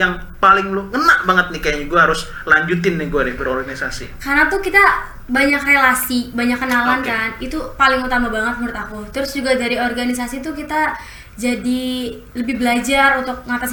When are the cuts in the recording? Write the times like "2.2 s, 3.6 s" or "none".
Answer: none